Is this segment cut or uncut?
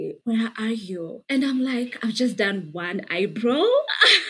uncut